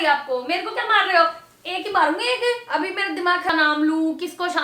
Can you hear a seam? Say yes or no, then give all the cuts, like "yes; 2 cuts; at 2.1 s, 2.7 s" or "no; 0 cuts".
yes; 1 cut; at 3.5 s